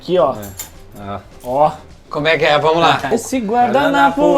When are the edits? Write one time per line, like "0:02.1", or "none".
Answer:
0:03.0